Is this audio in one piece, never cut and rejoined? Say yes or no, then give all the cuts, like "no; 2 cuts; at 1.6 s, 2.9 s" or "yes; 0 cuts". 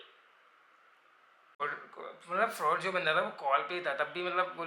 no; 1 cut; at 1.6 s